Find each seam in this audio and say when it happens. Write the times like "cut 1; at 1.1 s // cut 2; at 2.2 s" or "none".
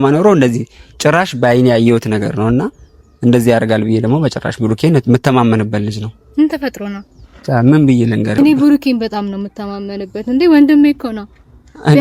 cut 1; at 8.4 s